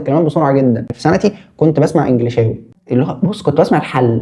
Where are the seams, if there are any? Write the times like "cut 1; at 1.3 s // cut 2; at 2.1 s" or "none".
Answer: cut 1; at 0.9 s // cut 2; at 2.7 s